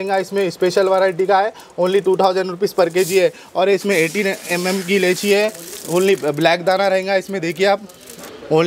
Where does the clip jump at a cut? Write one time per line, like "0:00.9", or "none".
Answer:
none